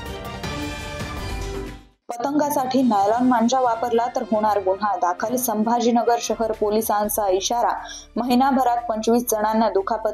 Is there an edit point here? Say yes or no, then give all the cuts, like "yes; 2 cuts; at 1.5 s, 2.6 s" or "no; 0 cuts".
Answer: no; 0 cuts